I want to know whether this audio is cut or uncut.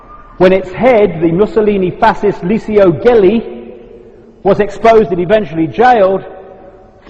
cut